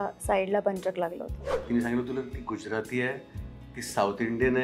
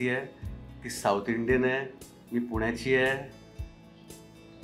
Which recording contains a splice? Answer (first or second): first